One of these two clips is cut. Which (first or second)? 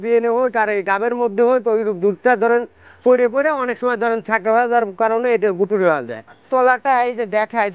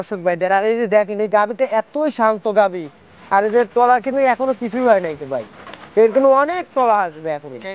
first